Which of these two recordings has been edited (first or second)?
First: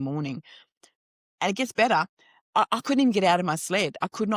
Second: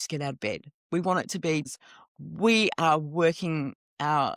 second